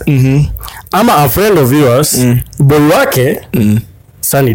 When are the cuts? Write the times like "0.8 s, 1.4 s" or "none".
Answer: none